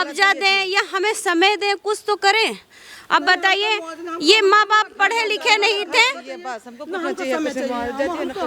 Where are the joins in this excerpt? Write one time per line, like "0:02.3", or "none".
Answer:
none